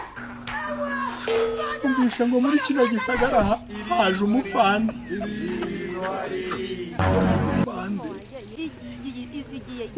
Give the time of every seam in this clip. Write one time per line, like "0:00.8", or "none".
0:08.5